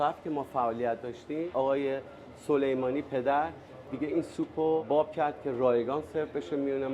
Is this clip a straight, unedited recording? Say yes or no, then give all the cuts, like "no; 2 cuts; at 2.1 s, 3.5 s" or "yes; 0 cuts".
no; 2 cuts; at 1.5 s, 4.8 s